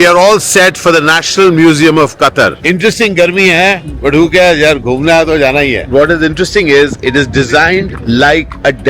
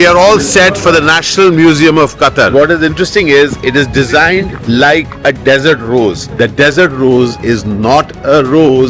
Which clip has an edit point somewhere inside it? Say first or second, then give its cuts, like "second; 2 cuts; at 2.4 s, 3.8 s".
second; 2 cuts; at 2.5 s, 6.2 s